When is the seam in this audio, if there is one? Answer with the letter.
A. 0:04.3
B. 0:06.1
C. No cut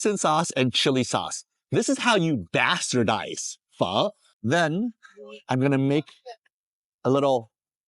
A